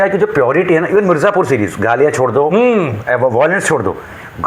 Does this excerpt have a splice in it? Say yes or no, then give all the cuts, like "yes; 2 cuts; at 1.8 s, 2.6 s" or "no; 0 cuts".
no; 0 cuts